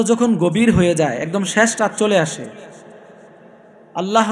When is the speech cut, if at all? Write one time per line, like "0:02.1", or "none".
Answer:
none